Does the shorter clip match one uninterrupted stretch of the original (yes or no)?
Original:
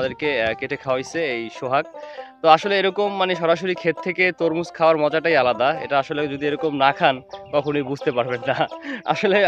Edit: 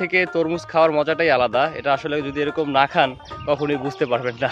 yes